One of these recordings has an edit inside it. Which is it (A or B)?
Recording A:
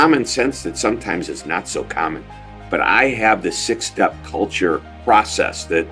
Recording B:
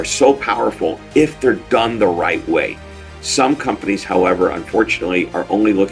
A